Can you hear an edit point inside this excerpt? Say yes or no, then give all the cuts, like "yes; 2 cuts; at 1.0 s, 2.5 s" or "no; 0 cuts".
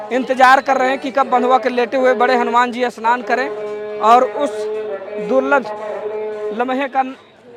no; 0 cuts